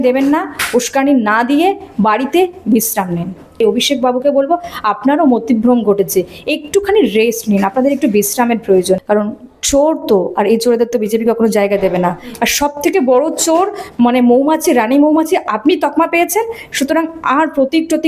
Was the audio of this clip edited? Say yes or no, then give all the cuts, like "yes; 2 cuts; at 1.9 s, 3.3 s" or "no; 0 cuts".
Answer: yes; 3 cuts; at 3.6 s, 9.0 s, 12.3 s